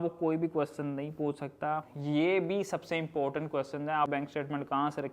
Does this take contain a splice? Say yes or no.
yes